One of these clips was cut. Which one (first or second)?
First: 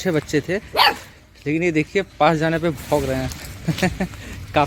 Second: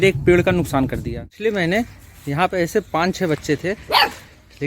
second